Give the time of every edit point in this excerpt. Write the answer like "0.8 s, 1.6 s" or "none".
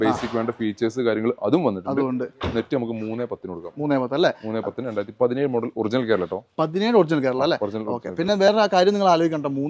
none